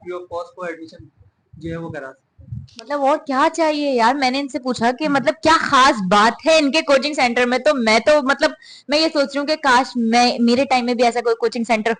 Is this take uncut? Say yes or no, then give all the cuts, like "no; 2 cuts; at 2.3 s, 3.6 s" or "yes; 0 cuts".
yes; 0 cuts